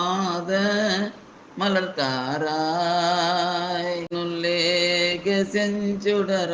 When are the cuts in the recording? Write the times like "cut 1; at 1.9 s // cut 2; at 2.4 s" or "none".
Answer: cut 1; at 4.1 s

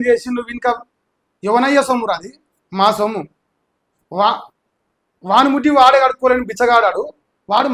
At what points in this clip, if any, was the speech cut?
none

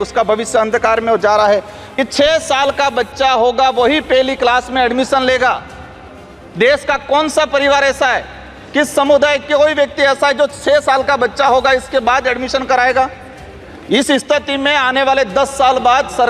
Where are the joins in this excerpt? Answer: cut 1; at 1.8 s

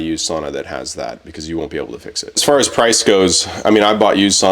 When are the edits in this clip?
cut 1; at 2.2 s

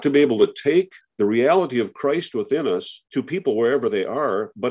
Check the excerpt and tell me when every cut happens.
cut 1; at 1.0 s // cut 2; at 3.0 s

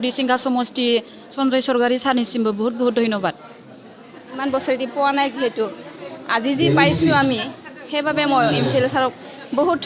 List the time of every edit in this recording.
cut 1; at 1.3 s // cut 2; at 4.4 s

